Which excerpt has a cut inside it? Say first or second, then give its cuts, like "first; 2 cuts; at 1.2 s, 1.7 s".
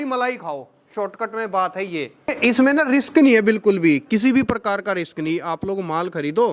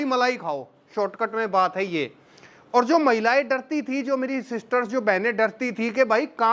first; 1 cut; at 2.3 s